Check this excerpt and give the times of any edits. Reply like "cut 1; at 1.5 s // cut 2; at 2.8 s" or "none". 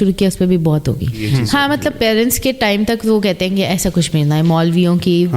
cut 1; at 1.3 s